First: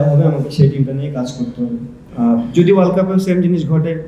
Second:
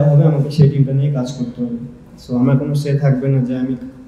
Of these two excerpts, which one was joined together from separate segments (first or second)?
first